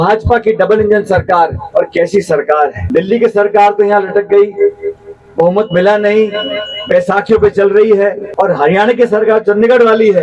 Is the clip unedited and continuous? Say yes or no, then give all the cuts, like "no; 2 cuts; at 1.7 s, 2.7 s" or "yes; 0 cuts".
no; 2 cuts; at 2.8 s, 8.2 s